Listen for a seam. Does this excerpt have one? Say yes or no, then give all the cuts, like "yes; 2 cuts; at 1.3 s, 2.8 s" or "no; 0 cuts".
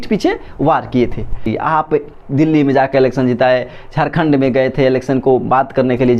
yes; 1 cut; at 1.5 s